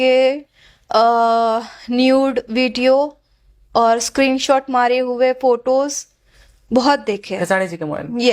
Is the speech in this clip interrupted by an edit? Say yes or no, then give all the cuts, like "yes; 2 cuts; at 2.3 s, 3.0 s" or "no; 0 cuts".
no; 0 cuts